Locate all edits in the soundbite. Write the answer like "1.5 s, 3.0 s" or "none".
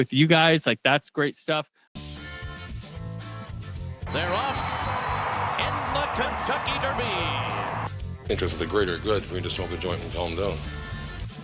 1.8 s